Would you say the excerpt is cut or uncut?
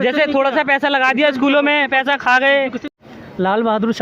cut